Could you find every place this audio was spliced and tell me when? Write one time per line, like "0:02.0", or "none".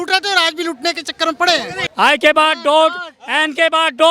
0:01.7